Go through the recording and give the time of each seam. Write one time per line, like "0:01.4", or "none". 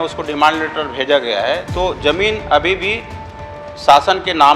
none